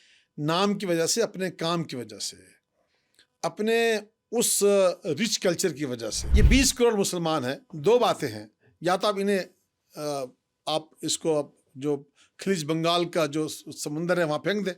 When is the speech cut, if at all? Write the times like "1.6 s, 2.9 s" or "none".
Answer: 6.2 s